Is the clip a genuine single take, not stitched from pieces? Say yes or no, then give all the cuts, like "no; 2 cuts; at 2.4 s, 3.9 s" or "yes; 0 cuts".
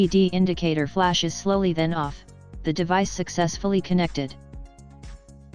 no; 1 cut; at 4.3 s